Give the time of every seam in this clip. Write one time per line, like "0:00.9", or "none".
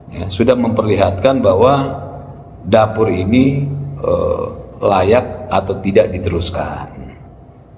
none